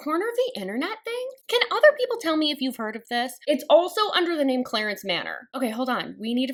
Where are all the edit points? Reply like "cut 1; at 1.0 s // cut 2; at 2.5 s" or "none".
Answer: none